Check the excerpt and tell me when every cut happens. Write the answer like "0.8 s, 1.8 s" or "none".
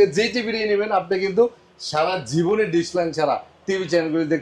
none